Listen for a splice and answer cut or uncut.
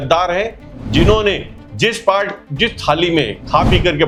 uncut